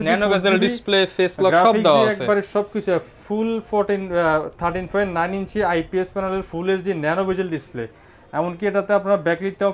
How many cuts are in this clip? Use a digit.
0